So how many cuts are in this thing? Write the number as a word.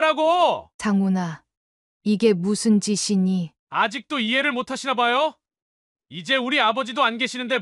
zero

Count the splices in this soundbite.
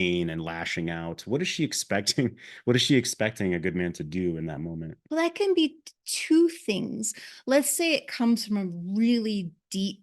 one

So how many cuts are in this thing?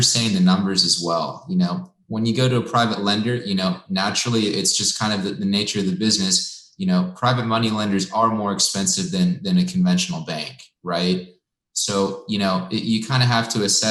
zero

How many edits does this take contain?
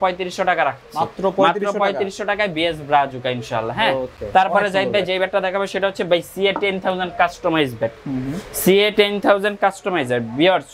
zero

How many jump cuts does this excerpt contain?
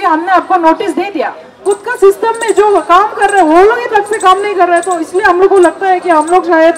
one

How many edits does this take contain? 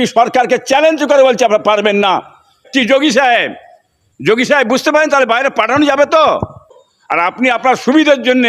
two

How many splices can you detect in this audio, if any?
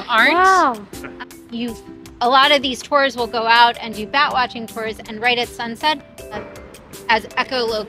two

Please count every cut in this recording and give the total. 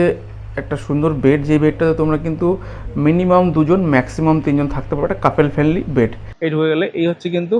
one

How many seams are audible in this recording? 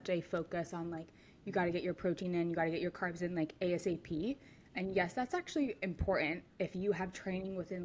zero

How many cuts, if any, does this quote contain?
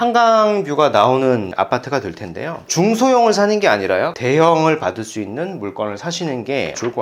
two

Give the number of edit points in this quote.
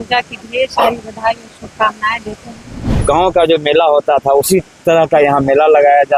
one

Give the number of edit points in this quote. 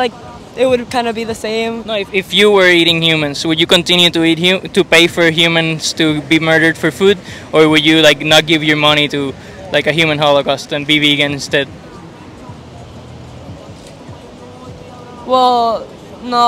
zero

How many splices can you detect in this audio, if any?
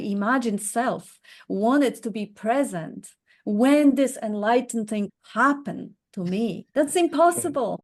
two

